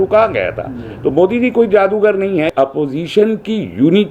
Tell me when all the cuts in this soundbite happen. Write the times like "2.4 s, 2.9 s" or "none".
2.5 s

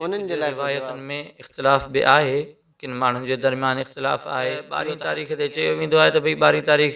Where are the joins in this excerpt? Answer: 0.9 s, 4.7 s

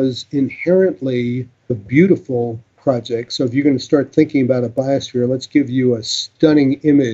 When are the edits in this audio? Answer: 1.8 s, 6.2 s

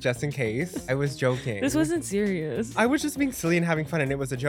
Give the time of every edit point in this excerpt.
0.9 s, 2.8 s

